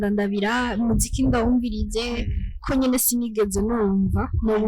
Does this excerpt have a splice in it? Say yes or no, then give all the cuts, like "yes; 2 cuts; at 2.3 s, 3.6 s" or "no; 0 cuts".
yes; 1 cut; at 2.6 s